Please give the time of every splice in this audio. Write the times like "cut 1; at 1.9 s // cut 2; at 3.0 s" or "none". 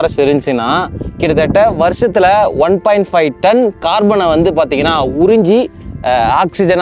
none